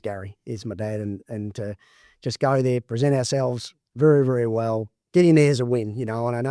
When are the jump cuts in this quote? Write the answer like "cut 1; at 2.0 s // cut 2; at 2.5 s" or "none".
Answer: cut 1; at 4.9 s